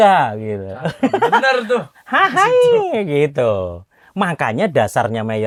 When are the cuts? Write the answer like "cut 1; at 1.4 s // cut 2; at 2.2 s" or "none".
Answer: none